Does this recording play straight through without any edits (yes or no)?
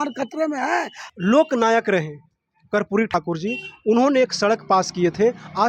no